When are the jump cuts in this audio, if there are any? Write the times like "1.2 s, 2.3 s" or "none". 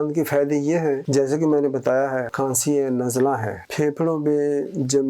1.0 s, 2.3 s